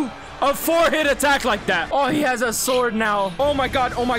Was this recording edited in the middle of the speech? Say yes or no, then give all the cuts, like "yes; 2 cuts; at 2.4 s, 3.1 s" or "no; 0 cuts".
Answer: yes; 2 cuts; at 1.9 s, 3.3 s